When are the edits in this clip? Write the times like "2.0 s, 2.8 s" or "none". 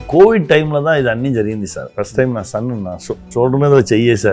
1.8 s, 3.2 s